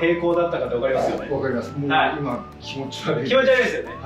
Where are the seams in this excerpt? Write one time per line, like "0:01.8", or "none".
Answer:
none

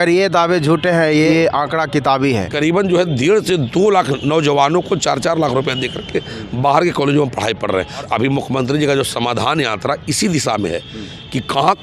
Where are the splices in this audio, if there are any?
0:01.3
0:02.5
0:08.1

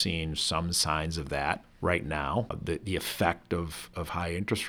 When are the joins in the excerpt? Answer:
0:01.7
0:02.6

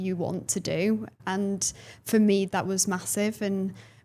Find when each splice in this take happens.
0:01.1
0:02.5

